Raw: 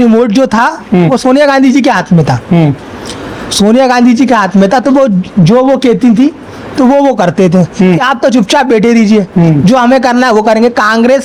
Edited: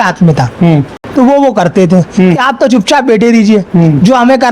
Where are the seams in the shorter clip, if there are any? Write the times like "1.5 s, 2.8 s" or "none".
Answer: 1.0 s